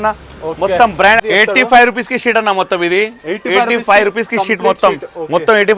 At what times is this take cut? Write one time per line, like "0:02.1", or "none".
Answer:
0:01.2